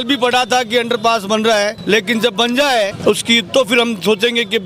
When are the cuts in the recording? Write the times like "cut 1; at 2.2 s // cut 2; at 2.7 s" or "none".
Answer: cut 1; at 1.8 s // cut 2; at 2.9 s